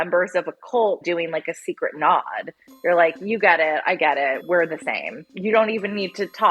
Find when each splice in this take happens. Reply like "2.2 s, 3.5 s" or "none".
5.2 s